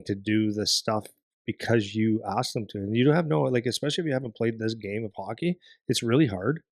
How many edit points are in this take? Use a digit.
0